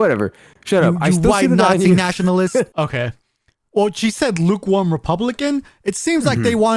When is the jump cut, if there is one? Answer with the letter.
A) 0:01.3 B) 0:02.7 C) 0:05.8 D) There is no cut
B